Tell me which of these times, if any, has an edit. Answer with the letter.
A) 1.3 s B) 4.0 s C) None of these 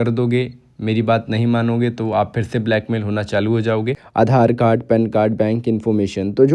B